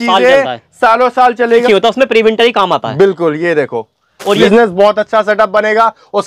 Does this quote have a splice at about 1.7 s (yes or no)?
yes